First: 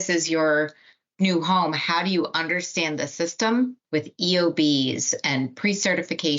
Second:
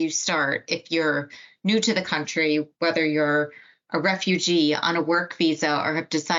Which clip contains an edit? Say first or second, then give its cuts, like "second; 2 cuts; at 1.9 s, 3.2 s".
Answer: first; 1 cut; at 3.8 s